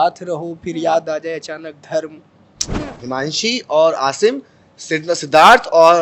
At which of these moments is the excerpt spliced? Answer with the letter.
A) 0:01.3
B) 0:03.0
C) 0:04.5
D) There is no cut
B